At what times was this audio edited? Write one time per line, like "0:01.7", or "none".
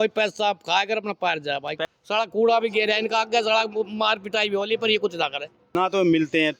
0:01.8
0:05.8